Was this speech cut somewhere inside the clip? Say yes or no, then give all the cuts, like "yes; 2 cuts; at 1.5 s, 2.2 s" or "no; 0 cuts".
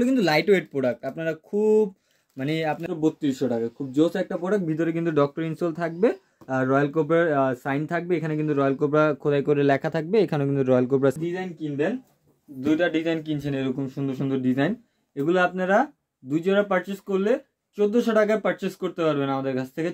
yes; 2 cuts; at 2.8 s, 11.2 s